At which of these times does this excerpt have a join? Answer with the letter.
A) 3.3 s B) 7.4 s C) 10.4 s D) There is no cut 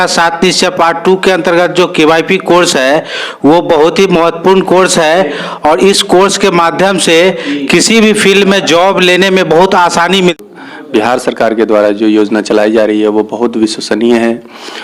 C